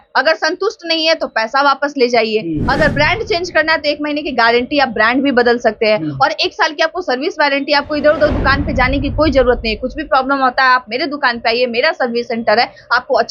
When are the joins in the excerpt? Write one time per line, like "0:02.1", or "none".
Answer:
none